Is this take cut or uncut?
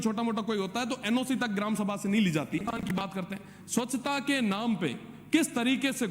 cut